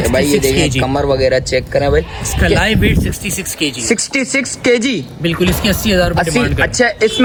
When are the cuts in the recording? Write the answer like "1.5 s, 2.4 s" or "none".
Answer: none